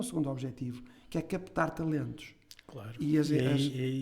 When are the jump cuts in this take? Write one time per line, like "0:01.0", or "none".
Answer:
none